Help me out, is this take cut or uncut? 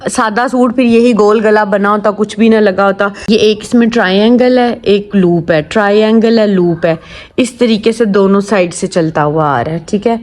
cut